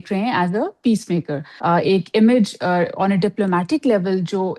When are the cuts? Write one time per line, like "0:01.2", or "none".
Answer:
0:01.5